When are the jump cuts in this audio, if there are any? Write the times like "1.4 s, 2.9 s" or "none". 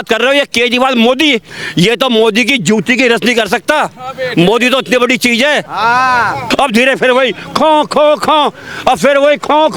6.4 s